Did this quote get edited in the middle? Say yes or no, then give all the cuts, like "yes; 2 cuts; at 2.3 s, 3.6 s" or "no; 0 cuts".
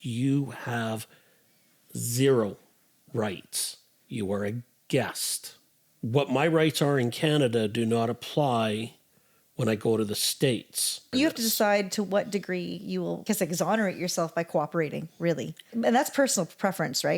yes; 3 cuts; at 11.1 s, 13.2 s, 15.6 s